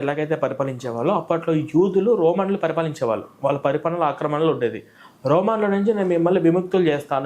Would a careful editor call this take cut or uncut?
uncut